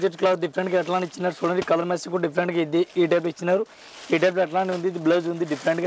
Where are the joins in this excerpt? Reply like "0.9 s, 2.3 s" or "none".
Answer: none